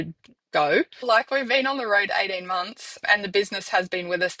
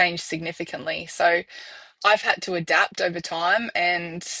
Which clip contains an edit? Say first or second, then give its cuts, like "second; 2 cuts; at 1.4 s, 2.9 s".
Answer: first; 1 cut; at 1.0 s